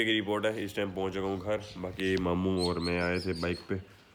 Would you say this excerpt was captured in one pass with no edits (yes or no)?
yes